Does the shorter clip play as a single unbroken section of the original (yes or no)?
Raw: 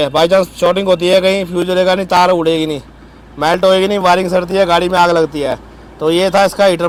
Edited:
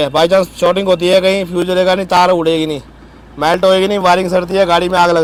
yes